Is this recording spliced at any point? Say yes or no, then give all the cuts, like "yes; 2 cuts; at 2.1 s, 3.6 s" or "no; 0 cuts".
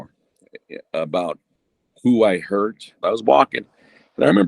yes; 1 cut; at 3.0 s